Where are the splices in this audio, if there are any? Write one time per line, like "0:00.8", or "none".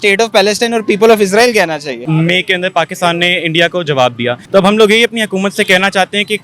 0:02.0
0:04.4